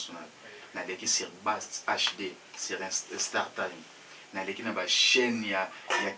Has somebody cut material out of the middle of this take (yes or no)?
no